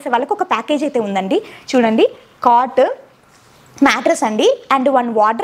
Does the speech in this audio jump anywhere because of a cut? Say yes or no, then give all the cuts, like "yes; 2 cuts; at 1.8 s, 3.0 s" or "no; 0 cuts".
no; 0 cuts